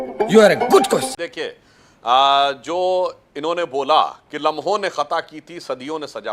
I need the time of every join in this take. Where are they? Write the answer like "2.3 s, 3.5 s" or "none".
1.2 s